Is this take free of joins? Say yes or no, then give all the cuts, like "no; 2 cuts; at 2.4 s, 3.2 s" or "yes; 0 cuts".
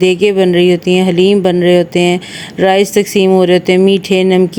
yes; 0 cuts